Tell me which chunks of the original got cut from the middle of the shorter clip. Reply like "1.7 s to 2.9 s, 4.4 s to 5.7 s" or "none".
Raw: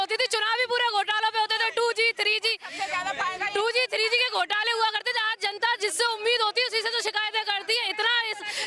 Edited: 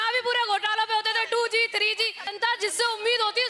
2.7 s to 5.4 s